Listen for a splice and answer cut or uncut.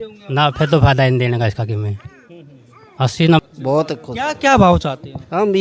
cut